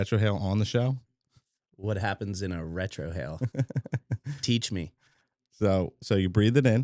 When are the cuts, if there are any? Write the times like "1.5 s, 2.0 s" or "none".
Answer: none